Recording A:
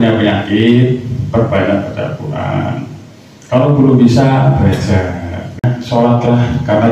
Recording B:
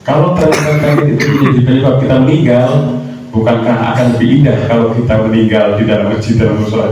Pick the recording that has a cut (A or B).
A